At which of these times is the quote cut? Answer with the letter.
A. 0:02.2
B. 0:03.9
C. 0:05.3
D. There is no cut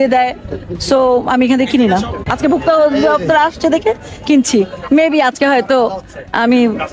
A